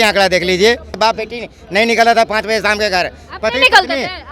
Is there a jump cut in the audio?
yes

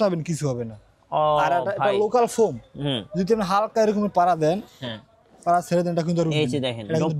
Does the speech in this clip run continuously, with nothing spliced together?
yes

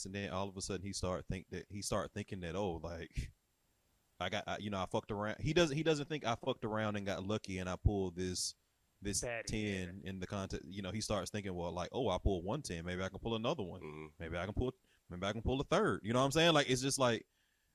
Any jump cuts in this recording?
no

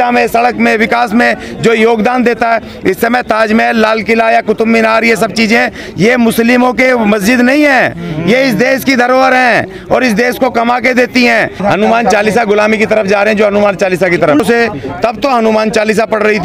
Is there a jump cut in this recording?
yes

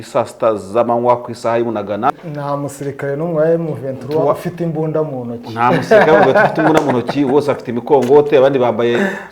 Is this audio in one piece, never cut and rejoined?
no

